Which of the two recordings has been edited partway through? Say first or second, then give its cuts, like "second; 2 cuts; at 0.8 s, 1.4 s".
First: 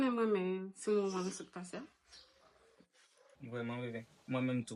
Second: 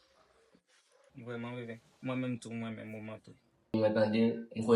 second; 1 cut; at 3.7 s